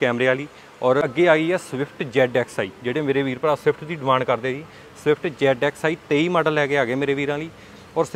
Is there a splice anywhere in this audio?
yes; 1 cut; at 1.0 s

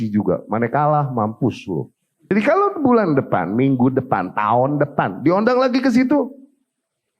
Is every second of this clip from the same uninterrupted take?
no; 1 cut; at 2.3 s

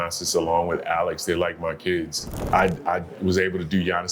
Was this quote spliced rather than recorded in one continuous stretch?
yes; 1 cut; at 2.3 s

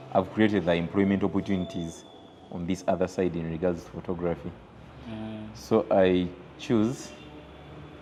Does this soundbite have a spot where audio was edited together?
no; 0 cuts

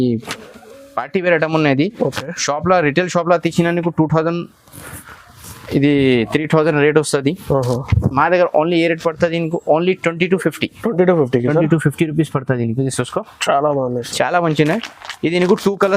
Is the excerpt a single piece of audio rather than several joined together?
yes; 0 cuts

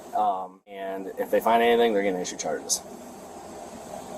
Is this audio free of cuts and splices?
no; 1 cut; at 0.9 s

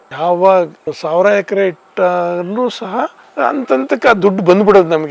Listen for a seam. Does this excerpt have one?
yes; 1 cut; at 3.2 s

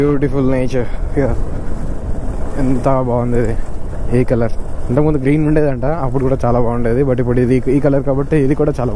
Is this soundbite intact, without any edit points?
yes; 0 cuts

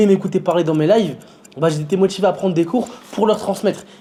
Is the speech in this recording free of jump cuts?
yes; 0 cuts

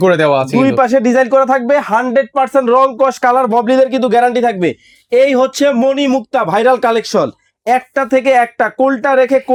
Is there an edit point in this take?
no; 0 cuts

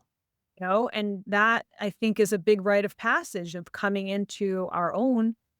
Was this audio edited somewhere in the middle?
no; 0 cuts

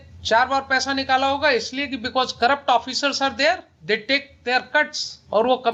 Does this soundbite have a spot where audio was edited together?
no; 0 cuts

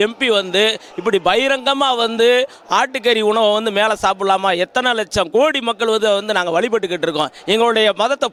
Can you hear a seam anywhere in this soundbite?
no; 0 cuts

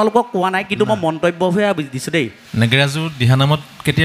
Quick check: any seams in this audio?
yes; 1 cut; at 2.4 s

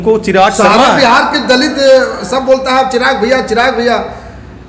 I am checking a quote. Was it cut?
no; 0 cuts

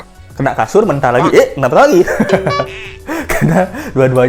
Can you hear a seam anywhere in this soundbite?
no; 0 cuts

